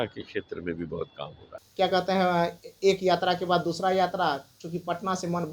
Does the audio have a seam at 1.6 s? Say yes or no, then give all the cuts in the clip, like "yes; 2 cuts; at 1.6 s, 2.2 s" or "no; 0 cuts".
yes; 1 cut; at 1.6 s